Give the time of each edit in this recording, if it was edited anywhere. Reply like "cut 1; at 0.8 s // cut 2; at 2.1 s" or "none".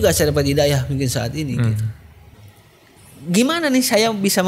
cut 1; at 2.4 s